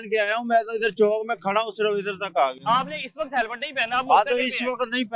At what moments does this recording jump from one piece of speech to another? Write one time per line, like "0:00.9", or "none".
none